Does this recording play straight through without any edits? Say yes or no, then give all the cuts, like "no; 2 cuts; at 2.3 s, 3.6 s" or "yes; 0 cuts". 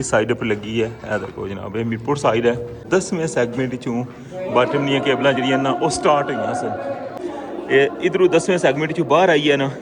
no; 2 cuts; at 2.8 s, 7.2 s